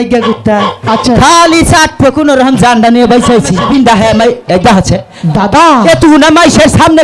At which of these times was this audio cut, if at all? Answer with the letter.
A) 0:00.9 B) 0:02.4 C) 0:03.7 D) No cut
C